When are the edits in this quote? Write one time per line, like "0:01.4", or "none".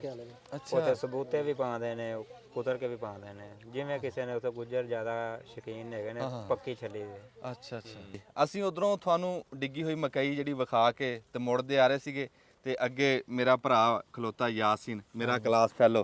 0:08.2